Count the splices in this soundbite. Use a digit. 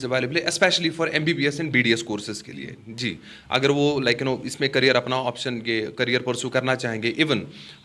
0